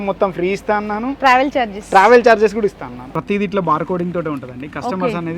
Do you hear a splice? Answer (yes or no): yes